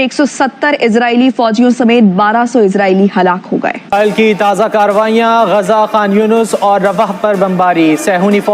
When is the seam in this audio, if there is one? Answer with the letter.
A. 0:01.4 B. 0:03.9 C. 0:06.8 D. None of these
B